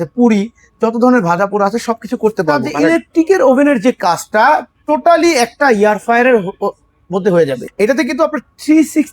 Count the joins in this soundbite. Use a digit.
2